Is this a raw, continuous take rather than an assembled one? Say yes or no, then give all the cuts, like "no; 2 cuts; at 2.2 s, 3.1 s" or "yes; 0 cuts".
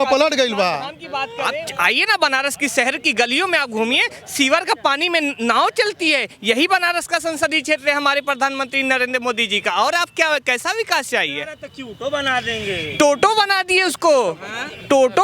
no; 1 cut; at 1.4 s